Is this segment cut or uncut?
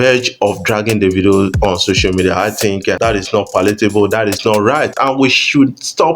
cut